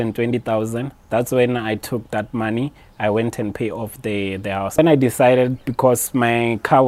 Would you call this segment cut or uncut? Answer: cut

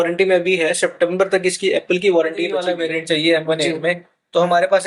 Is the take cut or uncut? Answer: cut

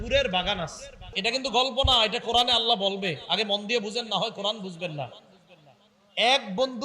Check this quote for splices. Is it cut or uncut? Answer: cut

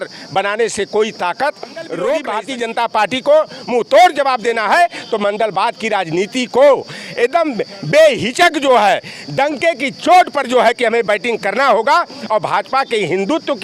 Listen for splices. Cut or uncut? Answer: cut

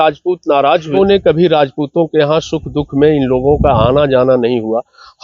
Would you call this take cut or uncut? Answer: cut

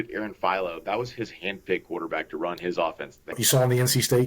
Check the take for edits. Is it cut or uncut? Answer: cut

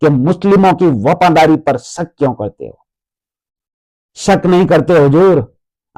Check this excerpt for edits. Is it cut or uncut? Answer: uncut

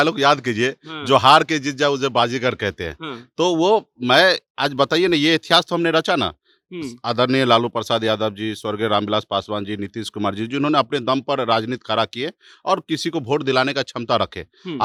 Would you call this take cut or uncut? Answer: uncut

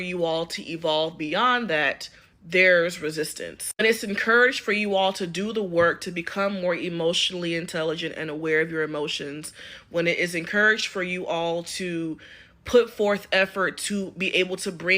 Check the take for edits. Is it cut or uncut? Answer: cut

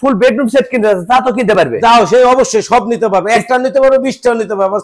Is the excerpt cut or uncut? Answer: uncut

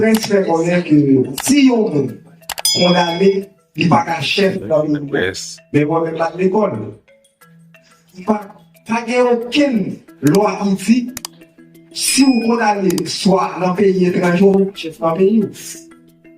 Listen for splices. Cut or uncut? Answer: cut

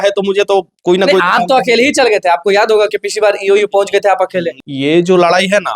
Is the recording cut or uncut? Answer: cut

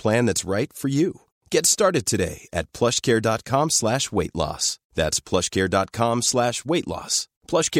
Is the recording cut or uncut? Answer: uncut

